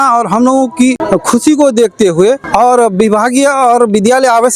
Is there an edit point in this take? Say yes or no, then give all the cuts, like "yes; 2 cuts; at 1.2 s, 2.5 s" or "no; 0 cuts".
yes; 2 cuts; at 1.0 s, 2.4 s